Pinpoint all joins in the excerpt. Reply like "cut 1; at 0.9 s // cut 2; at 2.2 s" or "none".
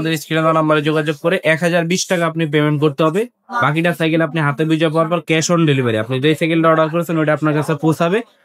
none